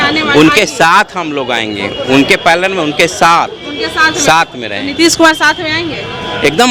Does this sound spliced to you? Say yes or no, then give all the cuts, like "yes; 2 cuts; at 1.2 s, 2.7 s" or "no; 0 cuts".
no; 0 cuts